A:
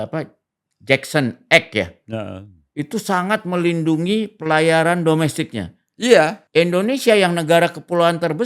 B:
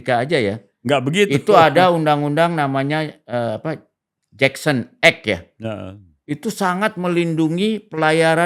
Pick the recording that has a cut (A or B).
A